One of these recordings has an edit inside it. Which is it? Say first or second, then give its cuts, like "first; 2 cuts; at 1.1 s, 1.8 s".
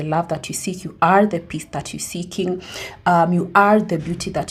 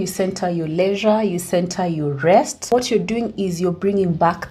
second; 1 cut; at 2.7 s